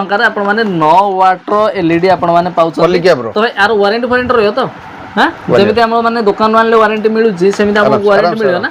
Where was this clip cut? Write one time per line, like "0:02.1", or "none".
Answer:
none